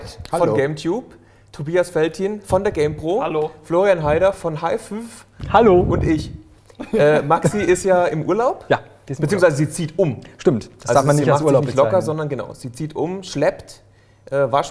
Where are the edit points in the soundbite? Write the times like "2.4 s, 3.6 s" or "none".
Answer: none